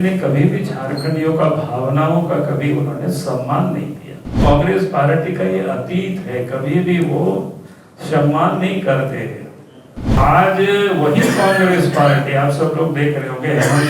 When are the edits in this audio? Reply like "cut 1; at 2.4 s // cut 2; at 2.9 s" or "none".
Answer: cut 1; at 4.4 s // cut 2; at 10.2 s

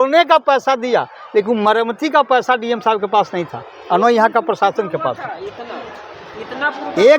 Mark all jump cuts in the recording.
none

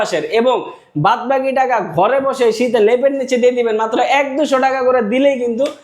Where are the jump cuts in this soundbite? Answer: none

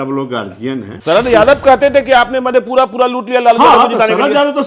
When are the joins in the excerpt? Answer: cut 1; at 0.9 s

